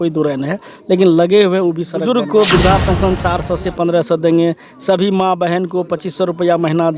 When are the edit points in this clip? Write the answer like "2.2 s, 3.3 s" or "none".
2.0 s